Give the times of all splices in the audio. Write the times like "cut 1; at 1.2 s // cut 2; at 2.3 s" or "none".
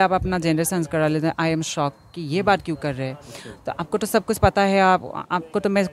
none